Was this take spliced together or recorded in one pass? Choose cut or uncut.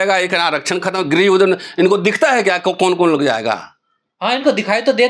uncut